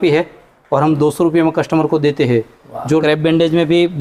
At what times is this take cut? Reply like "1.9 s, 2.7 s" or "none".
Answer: 3.0 s